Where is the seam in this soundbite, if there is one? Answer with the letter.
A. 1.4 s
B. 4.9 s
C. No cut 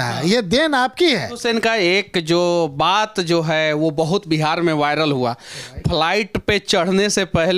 A